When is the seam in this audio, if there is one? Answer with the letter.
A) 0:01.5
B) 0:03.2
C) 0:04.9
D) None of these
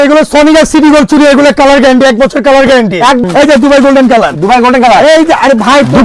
B